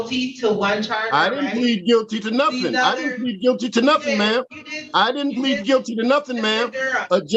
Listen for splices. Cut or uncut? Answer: uncut